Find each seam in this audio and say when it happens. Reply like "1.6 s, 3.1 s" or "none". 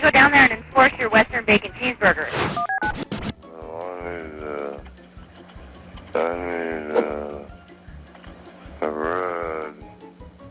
2.3 s, 3.4 s